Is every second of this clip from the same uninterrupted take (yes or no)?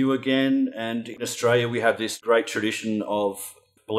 no